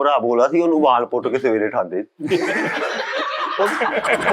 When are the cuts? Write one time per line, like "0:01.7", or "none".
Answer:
none